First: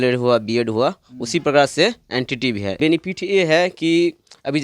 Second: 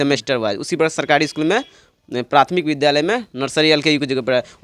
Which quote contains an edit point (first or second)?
first